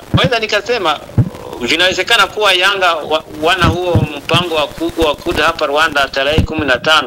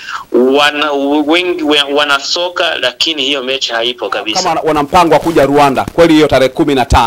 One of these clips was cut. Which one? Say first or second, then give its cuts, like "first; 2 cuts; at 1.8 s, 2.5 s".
second; 1 cut; at 4.5 s